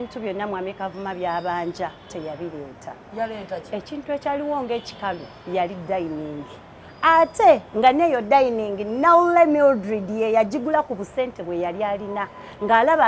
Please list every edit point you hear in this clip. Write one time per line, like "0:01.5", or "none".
none